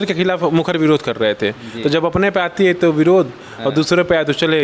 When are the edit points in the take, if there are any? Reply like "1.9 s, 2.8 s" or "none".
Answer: none